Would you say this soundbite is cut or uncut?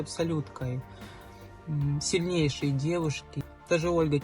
cut